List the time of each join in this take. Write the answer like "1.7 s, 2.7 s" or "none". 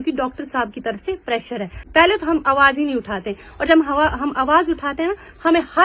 1.8 s